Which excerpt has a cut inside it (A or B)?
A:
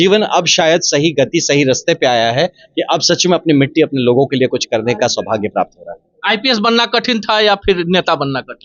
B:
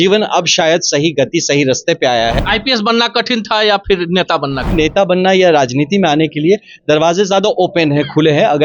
B